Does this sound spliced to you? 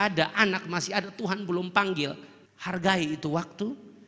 yes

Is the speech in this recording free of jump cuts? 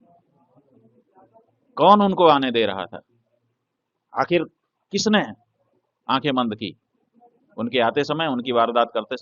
yes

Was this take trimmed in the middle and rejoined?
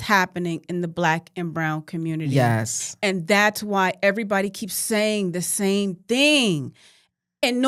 no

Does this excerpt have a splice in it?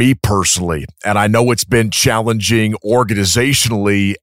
no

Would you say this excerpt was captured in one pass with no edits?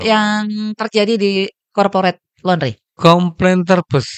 no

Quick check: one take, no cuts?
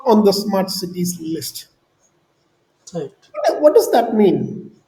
yes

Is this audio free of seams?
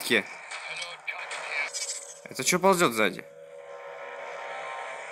no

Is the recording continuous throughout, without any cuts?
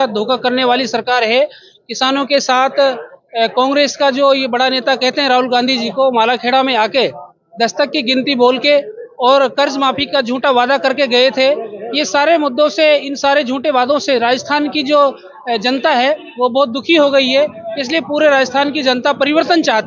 yes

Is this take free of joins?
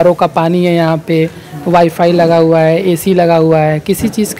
yes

